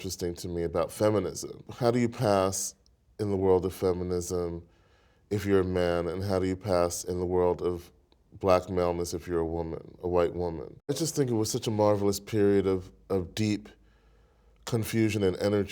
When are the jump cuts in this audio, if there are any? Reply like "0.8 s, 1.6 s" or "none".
1.7 s, 11.0 s